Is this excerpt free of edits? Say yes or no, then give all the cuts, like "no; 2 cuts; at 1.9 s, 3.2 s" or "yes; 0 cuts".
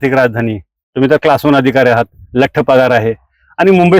yes; 0 cuts